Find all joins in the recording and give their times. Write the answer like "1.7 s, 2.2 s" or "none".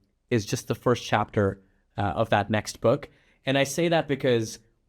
none

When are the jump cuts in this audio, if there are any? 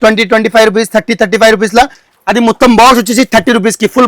2.0 s

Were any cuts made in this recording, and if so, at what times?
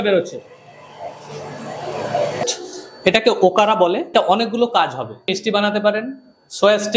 2.4 s, 4.1 s, 5.3 s

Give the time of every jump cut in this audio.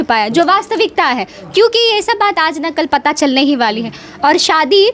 none

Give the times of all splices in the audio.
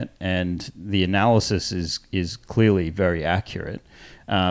none

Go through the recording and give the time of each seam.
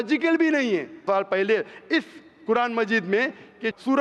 1.0 s

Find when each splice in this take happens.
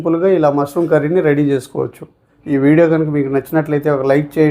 2.3 s

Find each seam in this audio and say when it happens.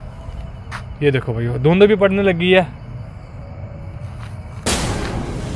4.6 s

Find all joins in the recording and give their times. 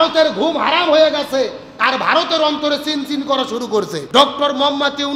1.7 s, 4.0 s

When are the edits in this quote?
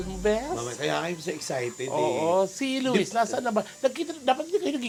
none

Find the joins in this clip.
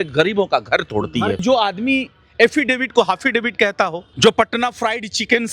1.4 s, 4.0 s

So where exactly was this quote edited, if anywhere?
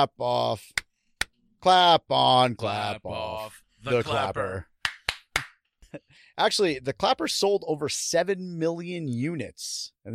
6.2 s

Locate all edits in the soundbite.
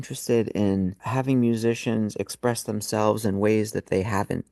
1.0 s

